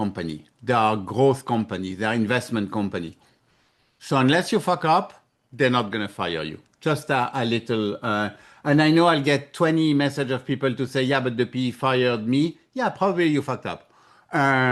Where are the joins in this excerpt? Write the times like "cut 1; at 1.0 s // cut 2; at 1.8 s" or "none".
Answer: none